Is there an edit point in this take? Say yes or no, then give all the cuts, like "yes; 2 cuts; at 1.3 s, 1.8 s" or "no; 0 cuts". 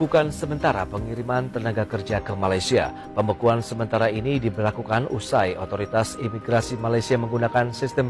no; 0 cuts